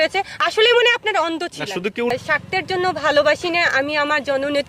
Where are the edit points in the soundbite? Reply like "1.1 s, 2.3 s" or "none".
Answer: 2.1 s